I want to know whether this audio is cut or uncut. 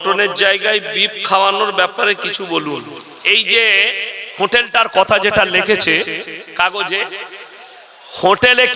cut